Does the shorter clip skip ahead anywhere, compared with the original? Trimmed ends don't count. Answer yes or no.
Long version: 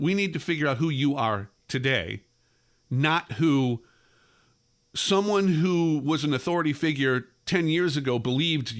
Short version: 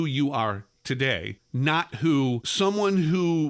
yes